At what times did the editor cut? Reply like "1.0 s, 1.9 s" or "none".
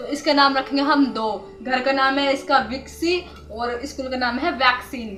none